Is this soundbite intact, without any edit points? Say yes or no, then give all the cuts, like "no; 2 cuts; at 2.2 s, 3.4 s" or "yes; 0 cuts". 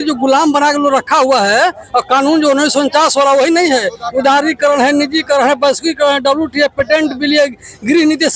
yes; 0 cuts